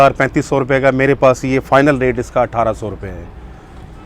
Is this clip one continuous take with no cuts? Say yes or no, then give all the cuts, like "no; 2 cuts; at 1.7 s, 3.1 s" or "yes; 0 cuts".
yes; 0 cuts